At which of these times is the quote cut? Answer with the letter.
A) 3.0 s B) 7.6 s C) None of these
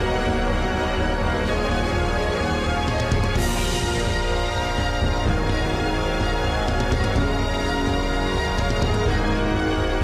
A